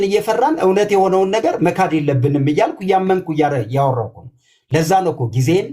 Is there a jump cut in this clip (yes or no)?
no